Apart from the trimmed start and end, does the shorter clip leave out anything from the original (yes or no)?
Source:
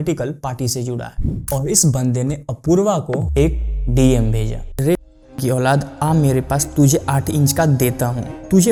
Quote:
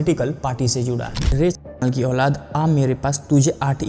yes